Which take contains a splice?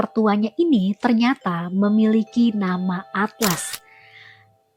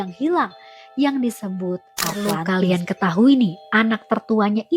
second; 1 cut; at 2.4 s

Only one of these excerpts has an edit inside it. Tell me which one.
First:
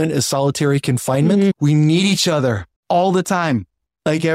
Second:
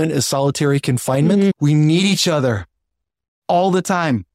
first; 1 cut; at 2.7 s

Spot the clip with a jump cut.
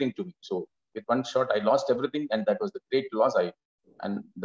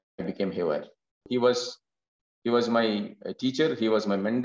second; 1 cut; at 1.3 s

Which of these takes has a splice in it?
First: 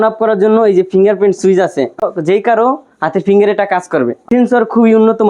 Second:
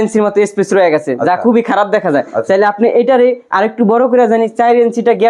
first; 2 cuts; at 2.0 s, 4.2 s

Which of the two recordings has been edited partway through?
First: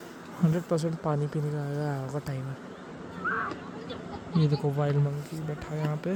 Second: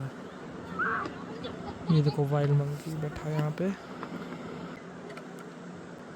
second; 1 cut; at 4.8 s

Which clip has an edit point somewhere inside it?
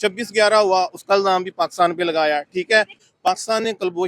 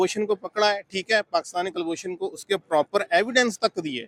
first; 1 cut; at 3.0 s

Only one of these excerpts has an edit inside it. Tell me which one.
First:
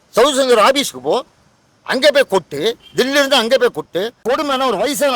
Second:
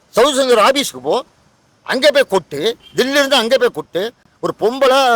first; 1 cut; at 4.2 s

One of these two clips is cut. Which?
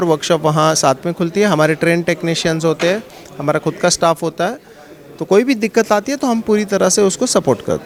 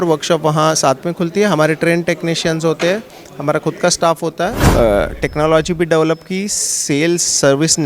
second; 1 cut; at 4.6 s

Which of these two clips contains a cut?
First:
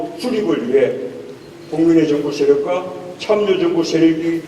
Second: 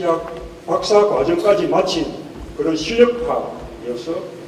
first; 1 cut; at 1.1 s

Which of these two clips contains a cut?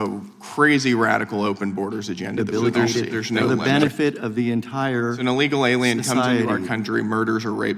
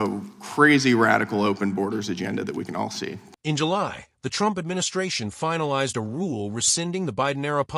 first; 1 cut; at 2.4 s

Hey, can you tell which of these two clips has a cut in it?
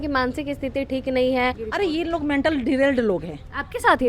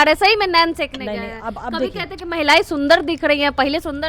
first; 1 cut; at 1.6 s

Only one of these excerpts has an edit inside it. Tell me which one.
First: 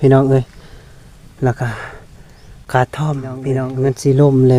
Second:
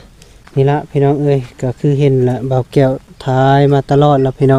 first; 1 cut; at 3.6 s

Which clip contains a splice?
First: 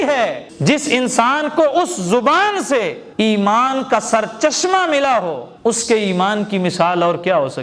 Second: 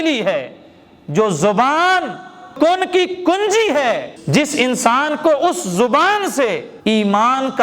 second; 1 cut; at 2.5 s

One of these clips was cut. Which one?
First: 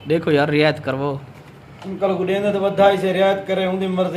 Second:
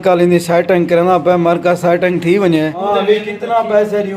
second; 1 cut; at 2.8 s

